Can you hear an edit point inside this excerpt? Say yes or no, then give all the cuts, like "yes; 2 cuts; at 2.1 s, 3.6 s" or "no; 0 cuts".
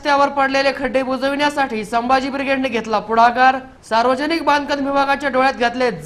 no; 0 cuts